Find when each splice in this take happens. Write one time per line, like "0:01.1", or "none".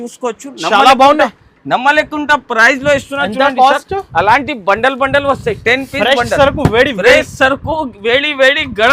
none